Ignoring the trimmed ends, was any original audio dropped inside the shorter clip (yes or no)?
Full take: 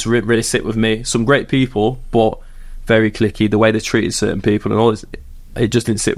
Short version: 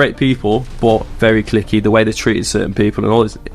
yes